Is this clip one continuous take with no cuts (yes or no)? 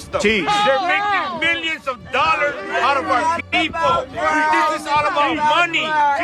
yes